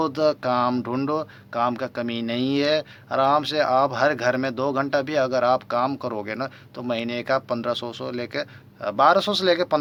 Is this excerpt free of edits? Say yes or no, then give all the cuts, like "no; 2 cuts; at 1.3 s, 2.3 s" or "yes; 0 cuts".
yes; 0 cuts